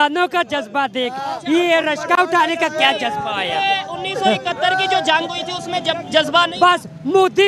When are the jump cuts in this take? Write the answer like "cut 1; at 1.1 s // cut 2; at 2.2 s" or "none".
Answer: none